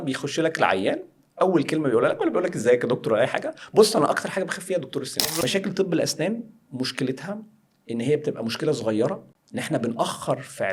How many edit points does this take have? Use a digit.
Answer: 2